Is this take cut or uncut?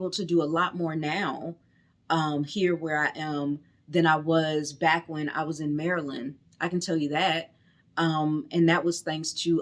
uncut